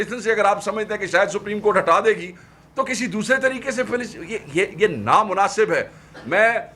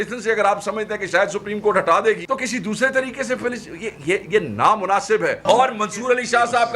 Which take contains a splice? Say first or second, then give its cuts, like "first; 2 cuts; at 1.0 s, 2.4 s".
second; 2 cuts; at 2.2 s, 5.4 s